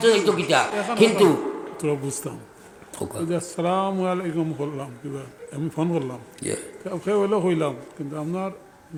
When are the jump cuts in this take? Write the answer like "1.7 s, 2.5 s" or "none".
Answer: none